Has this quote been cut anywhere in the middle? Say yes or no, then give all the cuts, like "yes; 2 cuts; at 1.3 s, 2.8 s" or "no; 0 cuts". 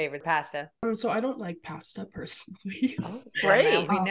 no; 0 cuts